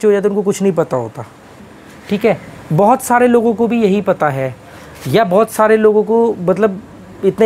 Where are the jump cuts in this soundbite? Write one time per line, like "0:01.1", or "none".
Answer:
0:01.6